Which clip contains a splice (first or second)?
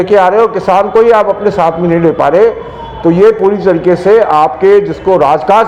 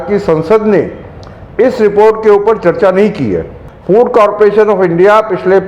second